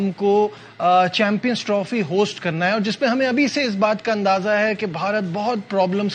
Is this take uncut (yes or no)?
yes